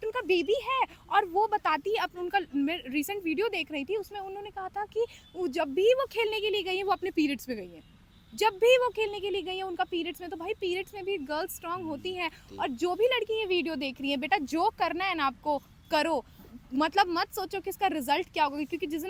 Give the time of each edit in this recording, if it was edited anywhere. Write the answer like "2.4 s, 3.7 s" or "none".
none